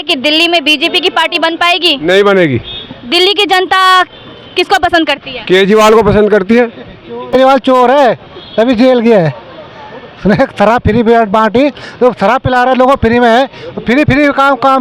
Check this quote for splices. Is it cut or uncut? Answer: cut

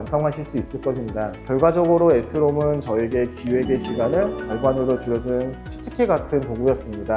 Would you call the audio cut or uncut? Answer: cut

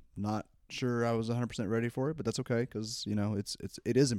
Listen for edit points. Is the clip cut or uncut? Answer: uncut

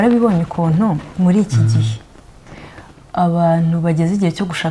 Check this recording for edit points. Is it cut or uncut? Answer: uncut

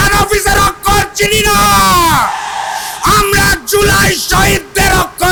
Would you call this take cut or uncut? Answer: uncut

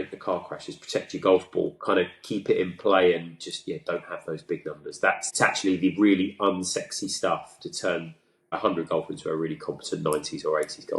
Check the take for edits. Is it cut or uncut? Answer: cut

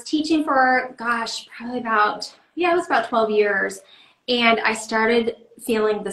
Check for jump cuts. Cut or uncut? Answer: uncut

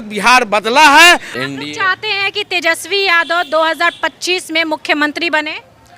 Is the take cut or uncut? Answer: cut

